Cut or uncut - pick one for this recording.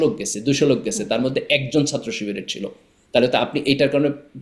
uncut